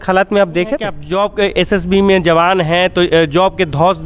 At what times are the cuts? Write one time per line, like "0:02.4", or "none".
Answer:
0:01.0